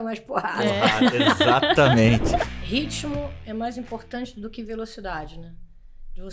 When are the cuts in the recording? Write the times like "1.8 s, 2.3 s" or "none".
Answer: 2.6 s